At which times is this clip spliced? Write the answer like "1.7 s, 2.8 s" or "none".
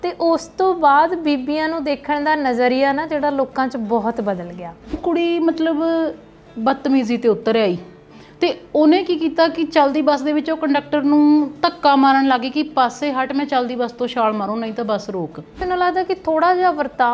5.0 s, 15.6 s